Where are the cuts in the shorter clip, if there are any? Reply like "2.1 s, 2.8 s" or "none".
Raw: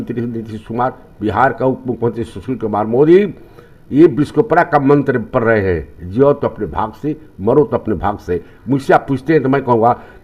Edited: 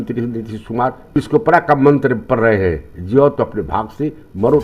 1.1 s